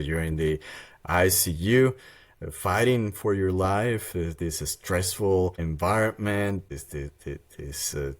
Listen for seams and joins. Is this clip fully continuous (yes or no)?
no